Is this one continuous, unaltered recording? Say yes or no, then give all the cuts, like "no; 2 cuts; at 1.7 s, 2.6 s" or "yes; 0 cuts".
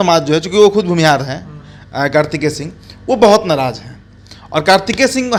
yes; 0 cuts